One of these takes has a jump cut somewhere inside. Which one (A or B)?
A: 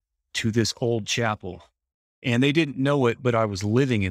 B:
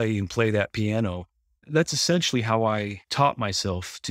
B